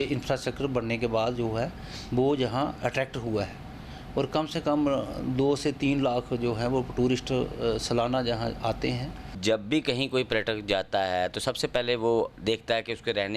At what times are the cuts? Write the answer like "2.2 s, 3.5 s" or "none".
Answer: 9.3 s